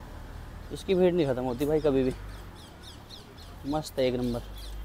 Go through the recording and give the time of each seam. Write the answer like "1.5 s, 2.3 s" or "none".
none

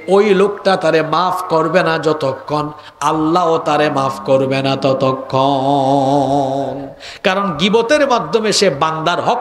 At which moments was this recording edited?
none

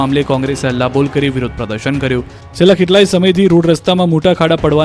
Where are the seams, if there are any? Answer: 1.8 s

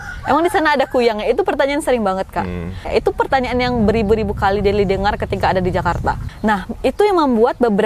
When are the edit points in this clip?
2.8 s, 6.3 s

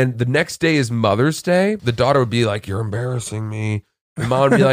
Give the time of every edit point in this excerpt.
1.8 s

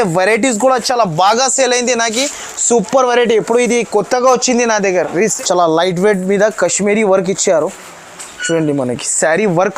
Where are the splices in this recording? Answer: 5.1 s

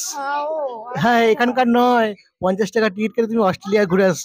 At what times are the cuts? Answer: none

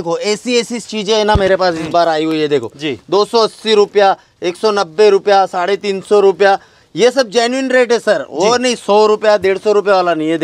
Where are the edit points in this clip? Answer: none

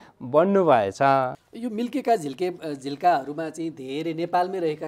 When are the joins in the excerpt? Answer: 1.3 s

